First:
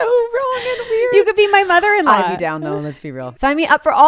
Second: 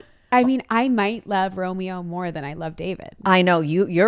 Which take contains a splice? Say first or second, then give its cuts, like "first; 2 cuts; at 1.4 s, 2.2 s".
first; 1 cut; at 3.0 s